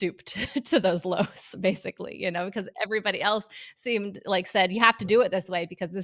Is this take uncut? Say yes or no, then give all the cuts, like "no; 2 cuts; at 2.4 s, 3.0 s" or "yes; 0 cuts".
yes; 0 cuts